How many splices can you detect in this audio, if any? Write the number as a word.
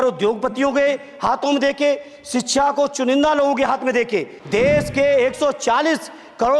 one